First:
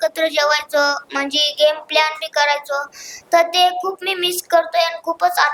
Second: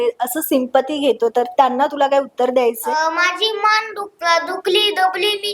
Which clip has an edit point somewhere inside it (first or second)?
second